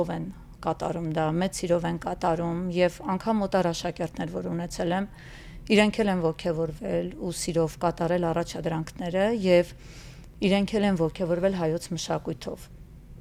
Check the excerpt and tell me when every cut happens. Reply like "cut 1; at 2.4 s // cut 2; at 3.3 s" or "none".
none